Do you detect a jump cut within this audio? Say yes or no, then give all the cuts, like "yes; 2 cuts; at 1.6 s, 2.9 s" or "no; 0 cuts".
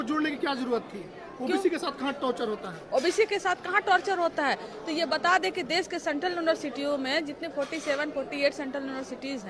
no; 0 cuts